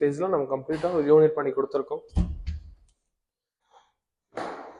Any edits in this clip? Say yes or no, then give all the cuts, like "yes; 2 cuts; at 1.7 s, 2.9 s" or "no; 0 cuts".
yes; 1 cut; at 3.5 s